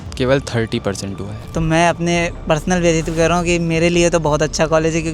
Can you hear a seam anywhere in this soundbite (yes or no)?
yes